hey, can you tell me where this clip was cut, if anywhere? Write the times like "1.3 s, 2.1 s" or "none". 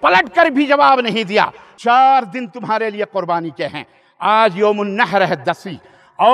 1.6 s

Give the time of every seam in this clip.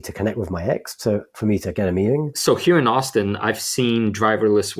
2.3 s

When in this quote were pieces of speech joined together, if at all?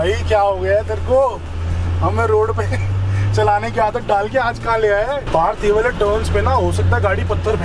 none

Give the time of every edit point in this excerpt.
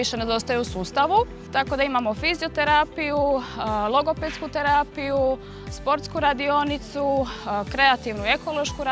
1.4 s

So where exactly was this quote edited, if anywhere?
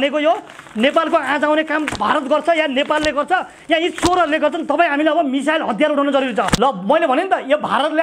6.5 s

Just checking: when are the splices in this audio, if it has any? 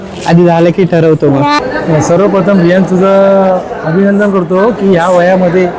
1.6 s

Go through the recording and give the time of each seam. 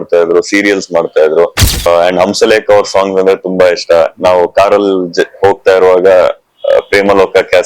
1.9 s

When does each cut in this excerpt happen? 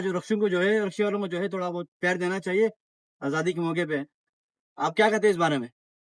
none

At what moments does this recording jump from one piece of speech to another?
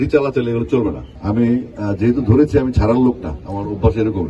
1.1 s

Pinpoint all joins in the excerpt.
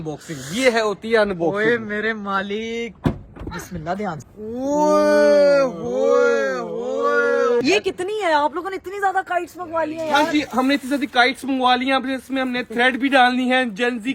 4.2 s, 7.6 s

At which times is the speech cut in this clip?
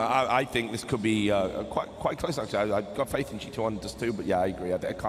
2.4 s

